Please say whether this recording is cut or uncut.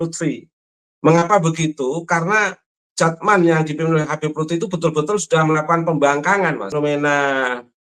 cut